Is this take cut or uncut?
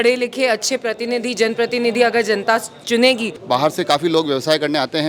cut